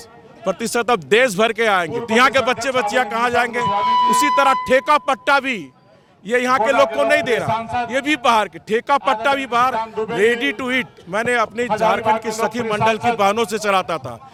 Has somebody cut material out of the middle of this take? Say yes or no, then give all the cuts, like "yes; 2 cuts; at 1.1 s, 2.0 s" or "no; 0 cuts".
no; 0 cuts